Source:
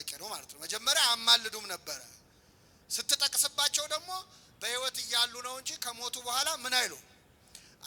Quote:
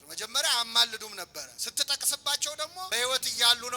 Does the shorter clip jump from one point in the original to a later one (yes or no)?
yes